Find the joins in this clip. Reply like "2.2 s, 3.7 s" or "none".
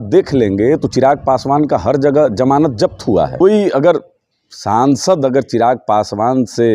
3.4 s

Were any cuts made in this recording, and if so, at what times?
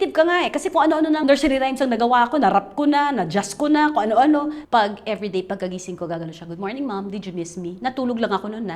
1.2 s, 4.6 s

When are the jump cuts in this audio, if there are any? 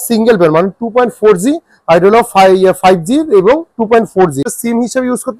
4.4 s

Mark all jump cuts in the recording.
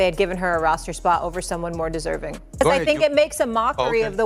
2.6 s

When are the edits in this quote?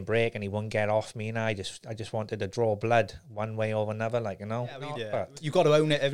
5.0 s

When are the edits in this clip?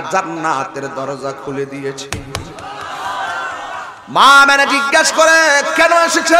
4.0 s

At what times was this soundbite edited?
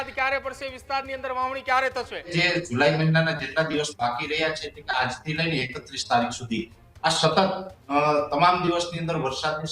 2.3 s

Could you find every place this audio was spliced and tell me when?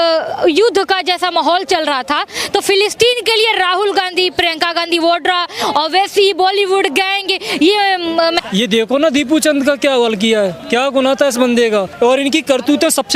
8.5 s, 10.6 s, 11.9 s

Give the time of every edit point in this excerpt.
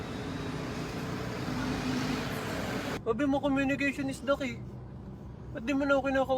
3.0 s

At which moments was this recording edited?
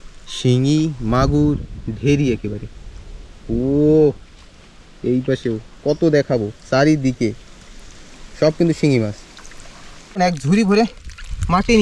10.2 s

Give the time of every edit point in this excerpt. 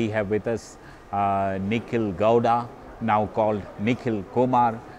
none

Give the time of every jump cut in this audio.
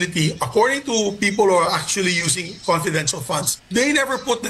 3.6 s

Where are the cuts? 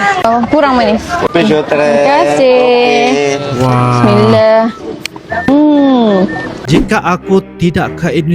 6.6 s

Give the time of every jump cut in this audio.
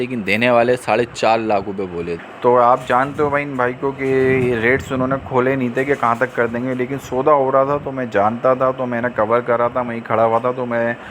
2.2 s

